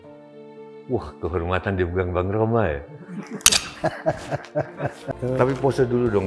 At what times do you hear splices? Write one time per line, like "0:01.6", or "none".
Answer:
0:05.2